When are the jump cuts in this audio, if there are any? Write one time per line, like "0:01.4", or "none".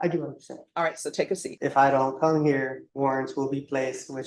0:01.5
0:02.8